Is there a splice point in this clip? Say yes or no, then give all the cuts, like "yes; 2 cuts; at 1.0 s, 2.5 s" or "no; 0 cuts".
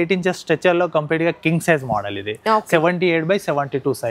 no; 0 cuts